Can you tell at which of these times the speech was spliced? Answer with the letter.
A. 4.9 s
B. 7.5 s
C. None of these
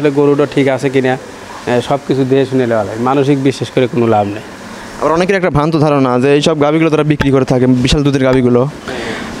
C